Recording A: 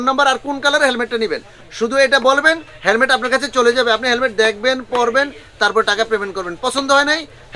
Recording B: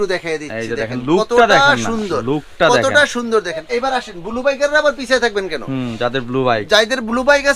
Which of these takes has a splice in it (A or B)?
B